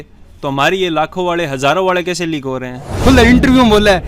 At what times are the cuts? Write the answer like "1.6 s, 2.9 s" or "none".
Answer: 2.9 s